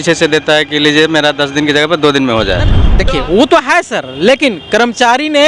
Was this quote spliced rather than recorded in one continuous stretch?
yes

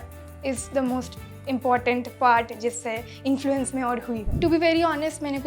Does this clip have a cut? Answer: yes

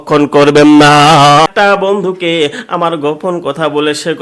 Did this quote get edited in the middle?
yes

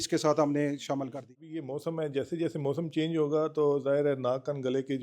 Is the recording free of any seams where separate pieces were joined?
no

